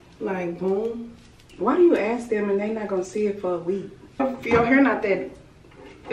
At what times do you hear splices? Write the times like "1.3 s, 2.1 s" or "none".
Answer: 4.2 s